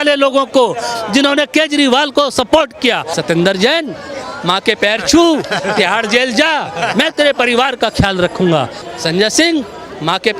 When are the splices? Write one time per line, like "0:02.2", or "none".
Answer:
0:03.1
0:08.8

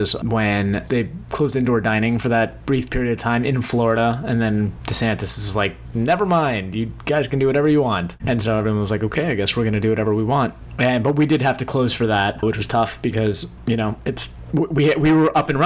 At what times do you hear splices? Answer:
0:00.8
0:02.6
0:04.8
0:05.8
0:08.1
0:10.6
0:12.4
0:13.5
0:14.3

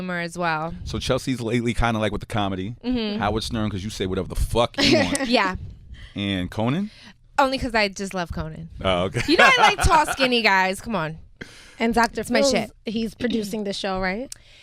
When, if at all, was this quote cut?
0:02.8

